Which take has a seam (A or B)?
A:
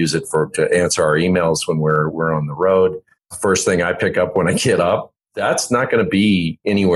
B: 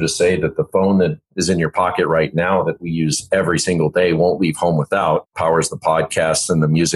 B